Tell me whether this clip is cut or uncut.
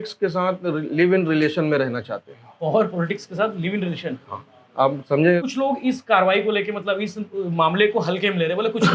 cut